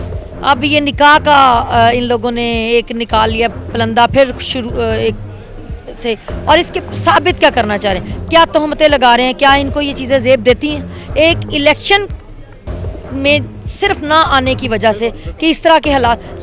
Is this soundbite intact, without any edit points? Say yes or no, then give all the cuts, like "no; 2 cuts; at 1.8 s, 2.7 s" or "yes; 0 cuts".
yes; 0 cuts